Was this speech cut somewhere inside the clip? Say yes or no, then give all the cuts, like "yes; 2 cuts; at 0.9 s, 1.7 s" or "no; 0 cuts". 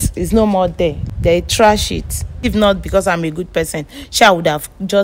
yes; 2 cuts; at 1.1 s, 2.4 s